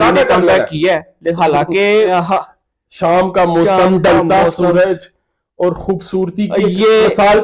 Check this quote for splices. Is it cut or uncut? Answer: cut